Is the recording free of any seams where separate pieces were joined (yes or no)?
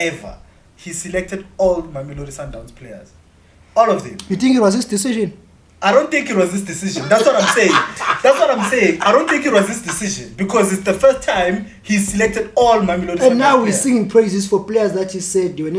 yes